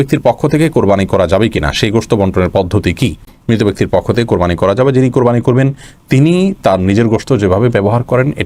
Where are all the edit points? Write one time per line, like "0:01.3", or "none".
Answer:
none